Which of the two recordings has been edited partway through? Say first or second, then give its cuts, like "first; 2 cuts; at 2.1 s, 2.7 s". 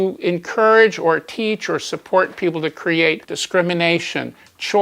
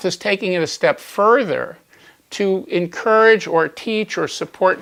first; 1 cut; at 3.3 s